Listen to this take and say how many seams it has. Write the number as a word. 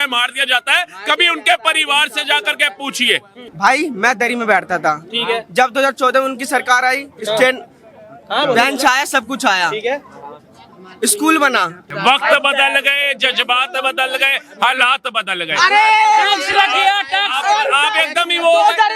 two